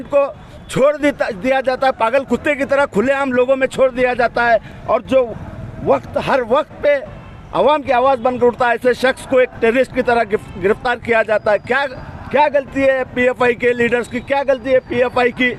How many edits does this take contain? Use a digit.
0